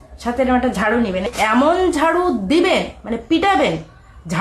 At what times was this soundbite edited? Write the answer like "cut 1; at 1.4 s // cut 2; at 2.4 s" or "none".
cut 1; at 1.3 s